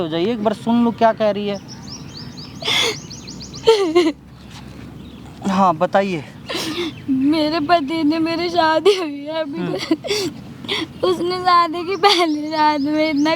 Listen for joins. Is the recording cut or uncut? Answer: uncut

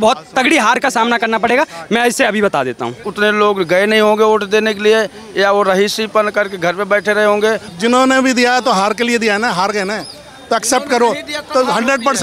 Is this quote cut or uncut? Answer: cut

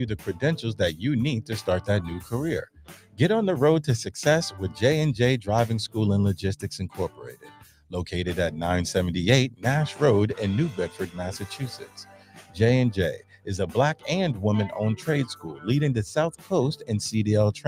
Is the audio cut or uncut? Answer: uncut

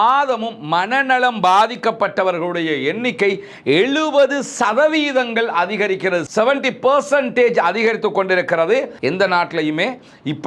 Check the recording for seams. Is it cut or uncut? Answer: cut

